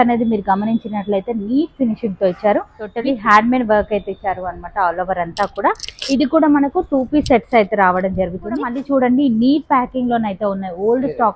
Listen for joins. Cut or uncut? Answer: cut